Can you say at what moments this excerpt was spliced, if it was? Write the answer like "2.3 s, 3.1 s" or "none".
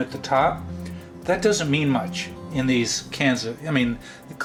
none

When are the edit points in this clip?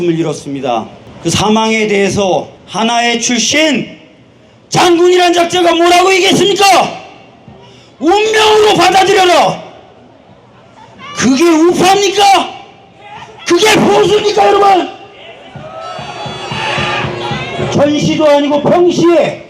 1.0 s, 2.6 s

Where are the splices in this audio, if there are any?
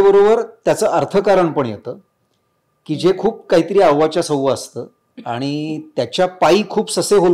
none

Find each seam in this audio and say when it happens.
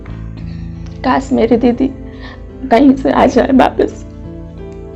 1.0 s, 3.9 s

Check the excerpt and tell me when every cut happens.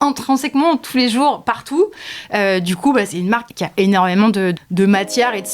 3.5 s, 4.6 s

